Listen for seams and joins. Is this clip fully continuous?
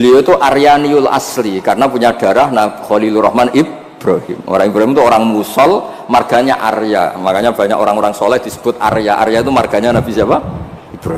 yes; 0 cuts

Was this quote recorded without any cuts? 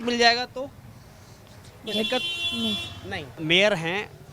no; 1 cut; at 3.3 s

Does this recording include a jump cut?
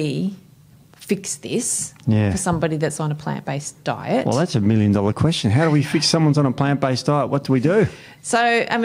no; 0 cuts

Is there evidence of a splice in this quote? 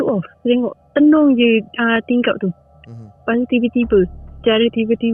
no; 0 cuts

